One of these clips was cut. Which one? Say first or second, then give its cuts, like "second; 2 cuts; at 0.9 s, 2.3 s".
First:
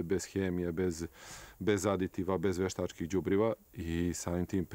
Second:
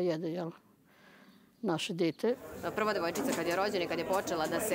second; 1 cut; at 2.7 s